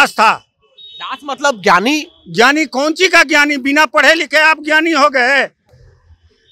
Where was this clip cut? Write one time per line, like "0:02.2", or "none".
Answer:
none